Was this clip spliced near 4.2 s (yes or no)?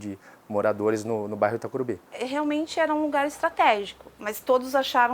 no